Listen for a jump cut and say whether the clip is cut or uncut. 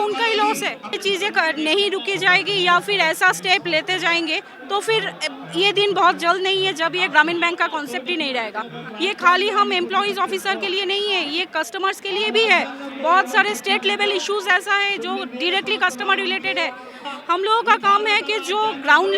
cut